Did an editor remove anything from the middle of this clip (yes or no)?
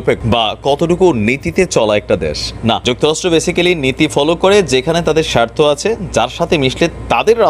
no